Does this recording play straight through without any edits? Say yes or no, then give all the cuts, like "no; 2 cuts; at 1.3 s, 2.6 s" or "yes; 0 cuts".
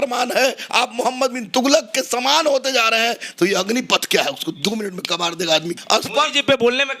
no; 2 cuts; at 3.2 s, 5.8 s